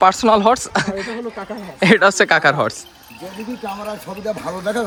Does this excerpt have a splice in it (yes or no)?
no